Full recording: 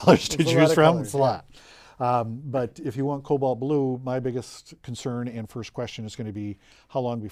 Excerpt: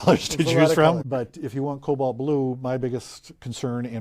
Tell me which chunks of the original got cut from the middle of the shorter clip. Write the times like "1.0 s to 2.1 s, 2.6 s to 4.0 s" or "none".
1.0 s to 2.5 s